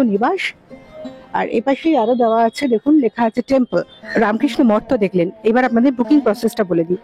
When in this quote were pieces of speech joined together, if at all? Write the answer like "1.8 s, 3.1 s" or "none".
4.0 s